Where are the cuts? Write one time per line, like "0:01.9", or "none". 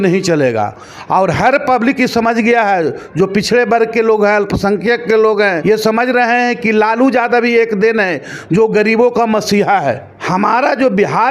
0:05.6
0:10.1

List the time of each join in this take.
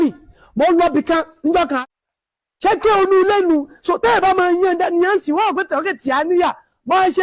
0:01.8

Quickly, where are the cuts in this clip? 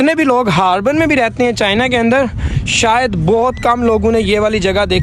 none

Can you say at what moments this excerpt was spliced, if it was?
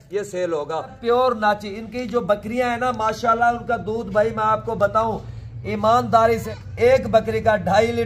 0:01.0
0:06.4

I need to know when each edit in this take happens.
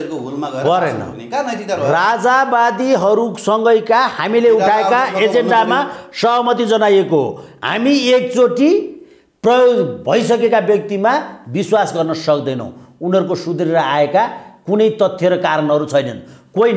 none

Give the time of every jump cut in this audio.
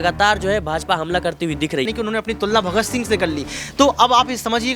0:01.9

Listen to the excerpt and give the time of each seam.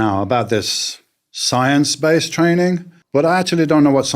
0:02.9

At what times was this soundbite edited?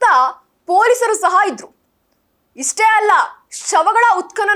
none

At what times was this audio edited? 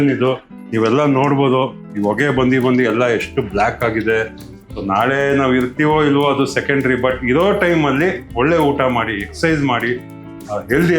0:04.7

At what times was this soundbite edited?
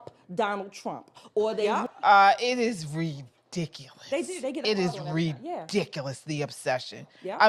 0:01.7

